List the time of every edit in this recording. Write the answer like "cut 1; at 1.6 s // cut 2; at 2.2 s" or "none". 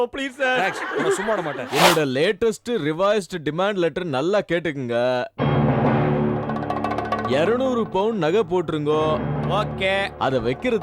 cut 1; at 1.6 s